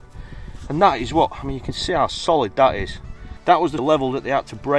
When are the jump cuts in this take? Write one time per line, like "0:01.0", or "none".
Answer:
0:03.8